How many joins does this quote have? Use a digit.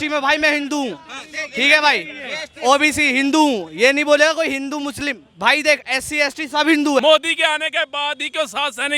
1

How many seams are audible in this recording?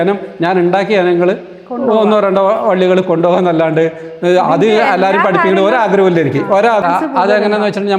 1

